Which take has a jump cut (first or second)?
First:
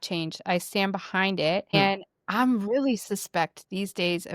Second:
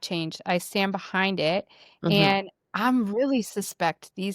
first